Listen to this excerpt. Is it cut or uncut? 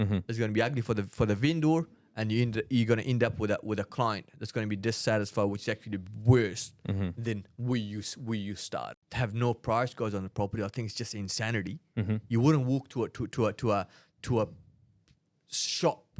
cut